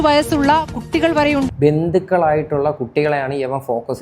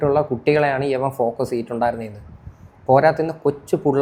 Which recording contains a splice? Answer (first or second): first